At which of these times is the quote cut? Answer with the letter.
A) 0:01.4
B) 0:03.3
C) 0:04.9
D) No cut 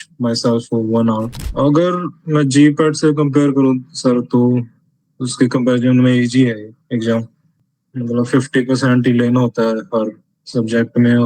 A